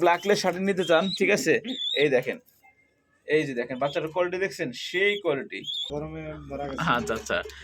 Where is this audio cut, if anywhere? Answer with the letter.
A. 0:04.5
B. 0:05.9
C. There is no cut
B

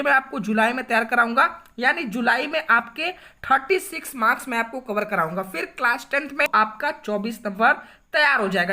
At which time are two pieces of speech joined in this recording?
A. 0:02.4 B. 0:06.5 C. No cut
B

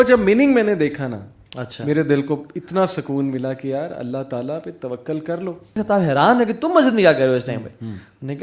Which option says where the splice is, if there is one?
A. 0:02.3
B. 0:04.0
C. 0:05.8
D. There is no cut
C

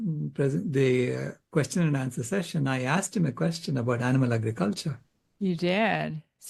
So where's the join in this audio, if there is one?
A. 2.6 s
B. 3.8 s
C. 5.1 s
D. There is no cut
D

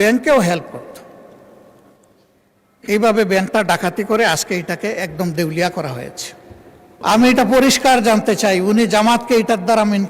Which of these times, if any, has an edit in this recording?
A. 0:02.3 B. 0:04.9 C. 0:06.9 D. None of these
C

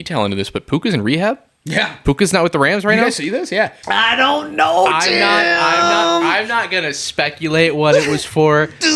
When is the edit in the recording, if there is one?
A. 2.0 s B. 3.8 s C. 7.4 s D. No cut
B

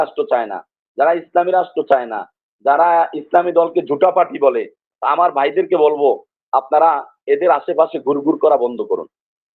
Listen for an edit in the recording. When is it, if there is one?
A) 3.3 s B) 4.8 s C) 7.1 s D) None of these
D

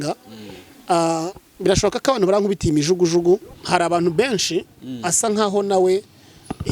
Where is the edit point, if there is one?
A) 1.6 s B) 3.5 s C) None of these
B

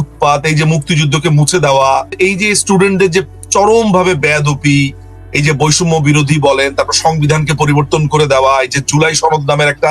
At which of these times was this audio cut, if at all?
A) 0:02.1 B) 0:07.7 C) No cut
A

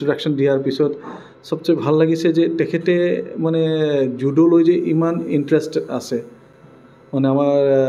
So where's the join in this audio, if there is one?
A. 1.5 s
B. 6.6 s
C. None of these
C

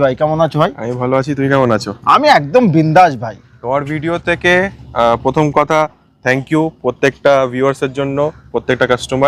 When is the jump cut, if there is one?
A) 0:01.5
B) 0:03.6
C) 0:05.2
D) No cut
D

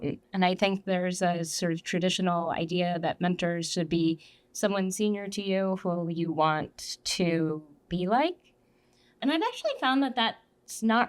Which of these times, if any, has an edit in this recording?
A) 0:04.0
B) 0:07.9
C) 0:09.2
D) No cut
C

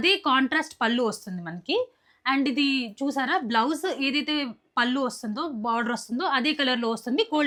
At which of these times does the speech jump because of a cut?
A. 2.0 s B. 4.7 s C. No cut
C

